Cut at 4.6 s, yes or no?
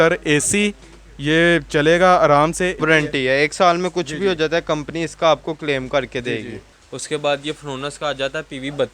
no